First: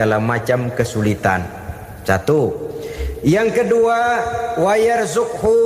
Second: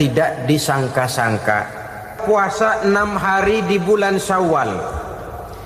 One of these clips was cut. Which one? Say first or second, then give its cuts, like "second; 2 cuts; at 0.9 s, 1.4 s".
second; 1 cut; at 2.2 s